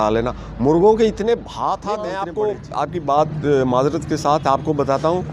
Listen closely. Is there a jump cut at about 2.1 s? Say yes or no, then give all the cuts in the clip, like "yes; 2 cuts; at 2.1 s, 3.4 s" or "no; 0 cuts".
yes; 1 cut; at 2.1 s